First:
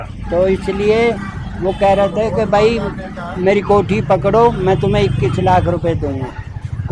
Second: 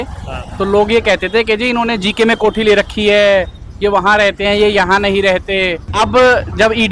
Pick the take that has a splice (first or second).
second